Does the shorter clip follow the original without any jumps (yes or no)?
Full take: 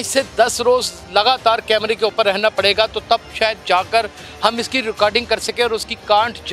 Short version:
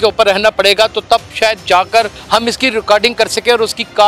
no